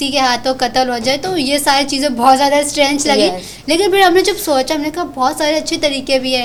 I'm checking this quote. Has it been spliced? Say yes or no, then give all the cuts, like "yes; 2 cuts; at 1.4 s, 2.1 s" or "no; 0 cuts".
no; 0 cuts